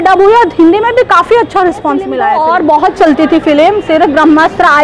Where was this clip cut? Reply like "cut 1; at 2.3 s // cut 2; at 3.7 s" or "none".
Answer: cut 1; at 2.2 s